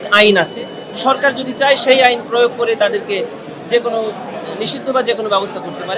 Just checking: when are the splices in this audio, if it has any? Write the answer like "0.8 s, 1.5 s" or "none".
none